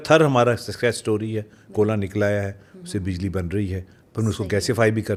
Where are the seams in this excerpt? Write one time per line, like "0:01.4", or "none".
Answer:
none